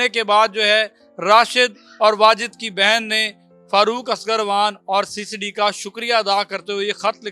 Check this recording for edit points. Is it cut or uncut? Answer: uncut